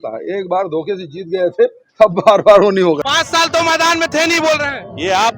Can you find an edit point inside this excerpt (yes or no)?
yes